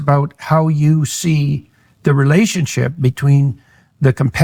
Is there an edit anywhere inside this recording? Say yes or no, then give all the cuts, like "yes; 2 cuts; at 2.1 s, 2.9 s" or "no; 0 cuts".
no; 0 cuts